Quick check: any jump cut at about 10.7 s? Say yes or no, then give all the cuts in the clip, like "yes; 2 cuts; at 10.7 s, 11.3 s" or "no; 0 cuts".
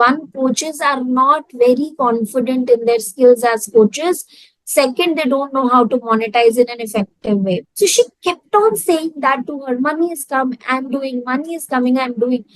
no; 1 cut; at 7.7 s